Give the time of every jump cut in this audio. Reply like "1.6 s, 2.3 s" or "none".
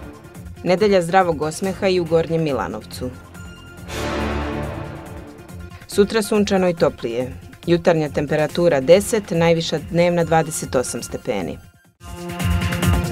12.1 s